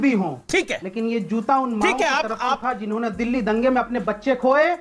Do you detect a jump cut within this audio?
no; 0 cuts

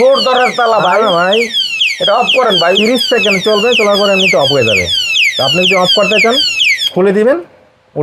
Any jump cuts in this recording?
no; 0 cuts

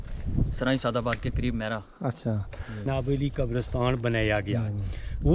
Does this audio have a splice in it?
yes; 1 cut; at 2.9 s

